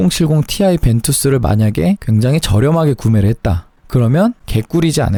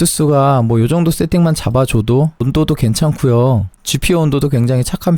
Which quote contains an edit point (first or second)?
second